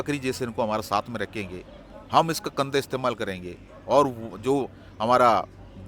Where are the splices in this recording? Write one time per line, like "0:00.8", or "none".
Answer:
none